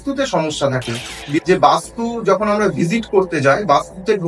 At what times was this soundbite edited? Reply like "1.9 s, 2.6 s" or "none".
1.4 s